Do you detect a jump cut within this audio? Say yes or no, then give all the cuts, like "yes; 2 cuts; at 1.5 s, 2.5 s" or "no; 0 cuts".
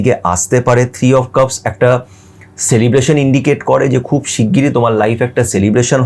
no; 0 cuts